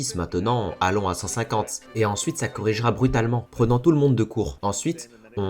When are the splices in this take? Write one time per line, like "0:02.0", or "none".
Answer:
0:04.6